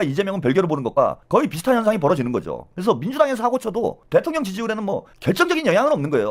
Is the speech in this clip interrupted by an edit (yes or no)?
no